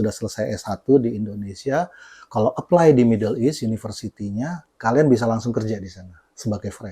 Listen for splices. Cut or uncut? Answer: uncut